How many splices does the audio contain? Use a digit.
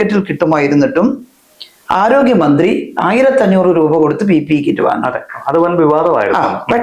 0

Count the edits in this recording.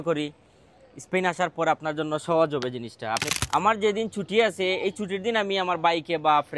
1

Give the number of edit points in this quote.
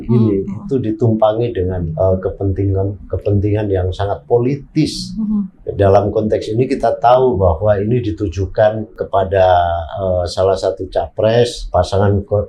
3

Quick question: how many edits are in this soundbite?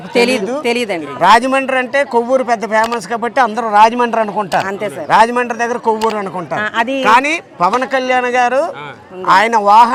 0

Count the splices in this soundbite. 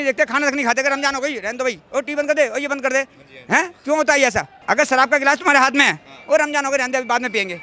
1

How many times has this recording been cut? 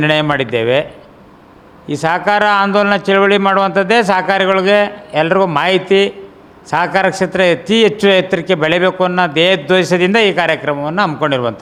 0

